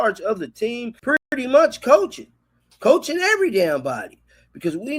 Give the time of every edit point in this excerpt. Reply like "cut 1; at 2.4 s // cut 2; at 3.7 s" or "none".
cut 1; at 1.4 s